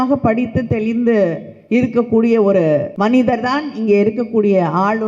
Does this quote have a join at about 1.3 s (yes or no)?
no